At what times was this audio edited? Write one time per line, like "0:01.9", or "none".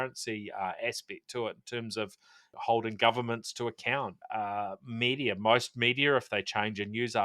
0:02.5
0:04.6